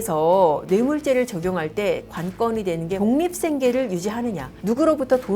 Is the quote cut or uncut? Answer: cut